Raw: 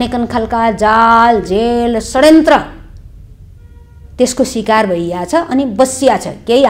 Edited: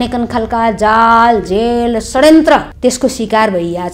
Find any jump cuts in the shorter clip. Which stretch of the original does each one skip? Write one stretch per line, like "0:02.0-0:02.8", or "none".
0:02.7-0:04.1